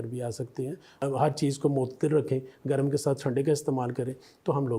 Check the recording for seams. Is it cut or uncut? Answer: cut